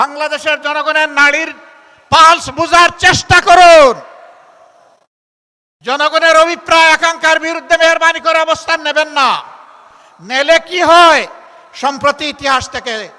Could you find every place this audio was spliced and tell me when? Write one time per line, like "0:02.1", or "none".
none